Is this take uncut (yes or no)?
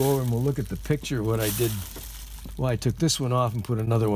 yes